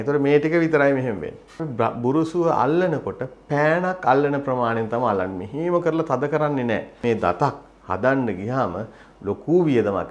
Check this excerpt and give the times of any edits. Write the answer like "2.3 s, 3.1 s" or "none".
1.7 s, 7.0 s